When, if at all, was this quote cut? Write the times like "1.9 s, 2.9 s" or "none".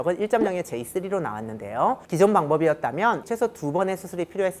2.0 s, 3.2 s